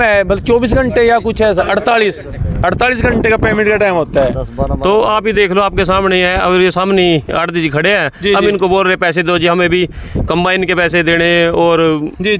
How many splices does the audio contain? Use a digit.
0